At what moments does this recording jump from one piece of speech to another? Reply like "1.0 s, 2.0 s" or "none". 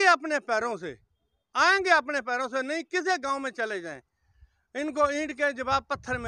none